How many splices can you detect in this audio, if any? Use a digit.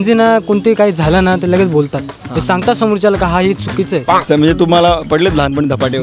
1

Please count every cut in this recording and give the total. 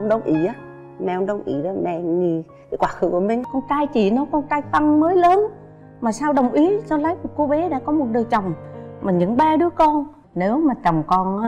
2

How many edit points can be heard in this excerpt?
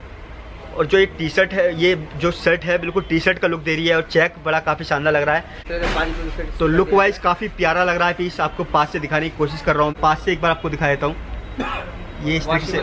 2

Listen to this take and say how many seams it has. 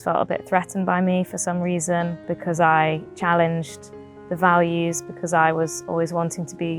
1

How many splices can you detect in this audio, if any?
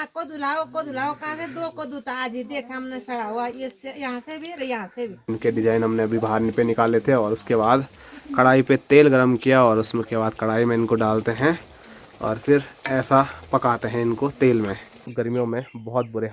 2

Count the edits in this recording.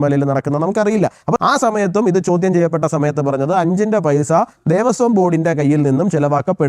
1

